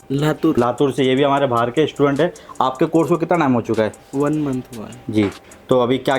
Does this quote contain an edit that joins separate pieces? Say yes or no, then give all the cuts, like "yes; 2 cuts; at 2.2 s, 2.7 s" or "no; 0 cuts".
no; 0 cuts